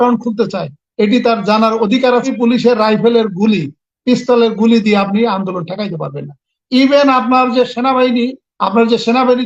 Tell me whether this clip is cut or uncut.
cut